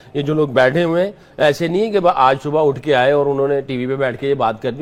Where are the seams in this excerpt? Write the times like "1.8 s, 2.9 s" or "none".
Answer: none